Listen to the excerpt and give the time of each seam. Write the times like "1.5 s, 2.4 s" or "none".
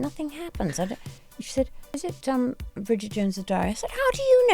2.0 s